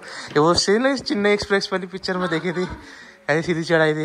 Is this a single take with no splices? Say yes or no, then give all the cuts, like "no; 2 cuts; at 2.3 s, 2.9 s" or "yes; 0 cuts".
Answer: yes; 0 cuts